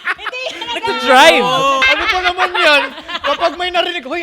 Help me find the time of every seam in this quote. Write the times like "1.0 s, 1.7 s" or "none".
1.8 s